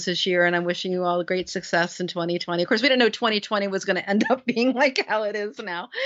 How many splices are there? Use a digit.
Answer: 0